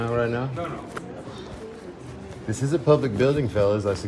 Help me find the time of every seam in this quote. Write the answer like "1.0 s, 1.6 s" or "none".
1.0 s